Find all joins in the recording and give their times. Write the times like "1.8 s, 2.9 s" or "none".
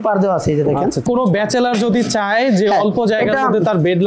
1.0 s

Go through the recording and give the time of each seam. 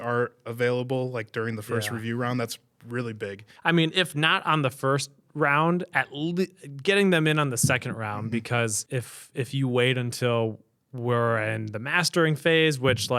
3.5 s, 8.8 s

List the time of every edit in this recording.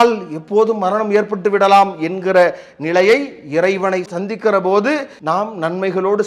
5.1 s

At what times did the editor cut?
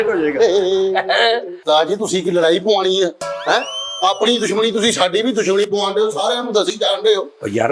1.6 s

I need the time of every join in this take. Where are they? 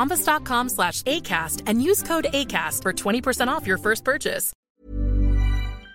4.5 s

